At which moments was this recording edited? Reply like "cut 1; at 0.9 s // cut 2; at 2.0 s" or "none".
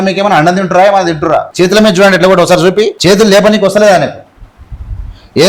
cut 1; at 1.5 s // cut 2; at 2.9 s